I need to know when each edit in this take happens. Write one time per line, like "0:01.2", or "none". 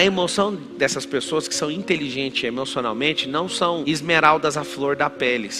none